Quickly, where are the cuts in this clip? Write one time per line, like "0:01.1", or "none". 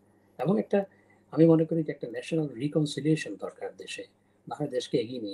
none

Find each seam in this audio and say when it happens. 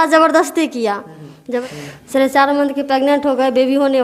0:01.6

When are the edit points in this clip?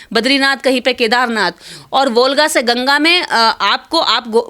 none

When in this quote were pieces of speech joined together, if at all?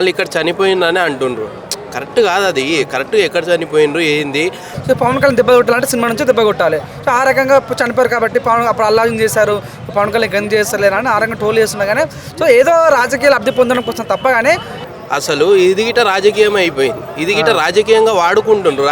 0:04.7
0:14.7

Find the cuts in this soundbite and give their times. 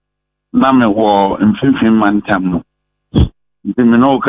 none

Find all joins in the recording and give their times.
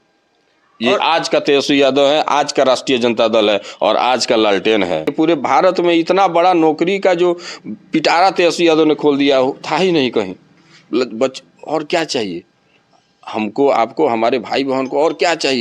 0:05.1

